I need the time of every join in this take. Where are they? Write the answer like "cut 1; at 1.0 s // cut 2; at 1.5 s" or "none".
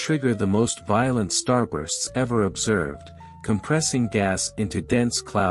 cut 1; at 1.1 s